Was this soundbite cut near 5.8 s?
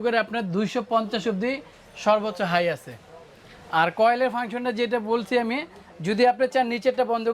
no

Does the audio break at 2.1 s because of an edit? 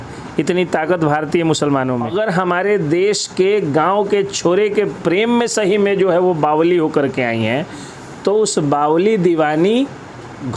yes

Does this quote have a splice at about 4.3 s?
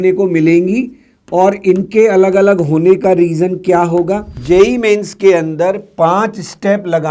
yes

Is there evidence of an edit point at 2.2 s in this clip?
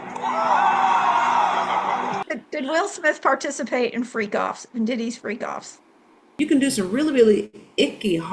yes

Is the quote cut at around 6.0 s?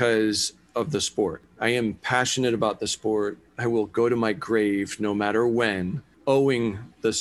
yes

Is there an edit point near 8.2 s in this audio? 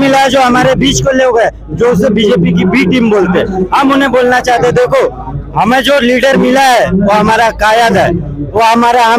no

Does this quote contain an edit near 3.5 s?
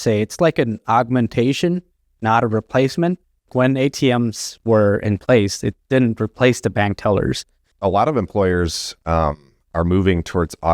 yes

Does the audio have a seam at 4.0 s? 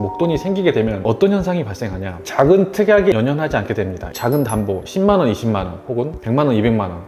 yes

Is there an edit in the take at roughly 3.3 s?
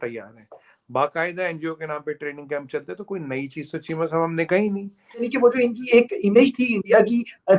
no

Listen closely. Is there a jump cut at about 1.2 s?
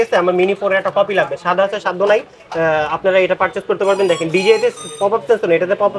no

